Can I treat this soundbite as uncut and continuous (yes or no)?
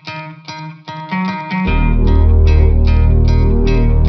yes